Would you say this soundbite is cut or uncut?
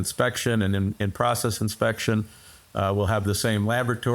uncut